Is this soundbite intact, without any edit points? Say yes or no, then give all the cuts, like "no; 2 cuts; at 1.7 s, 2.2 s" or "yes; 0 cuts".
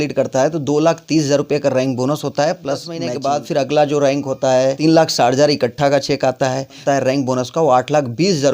no; 3 cuts; at 3.1 s, 4.8 s, 6.8 s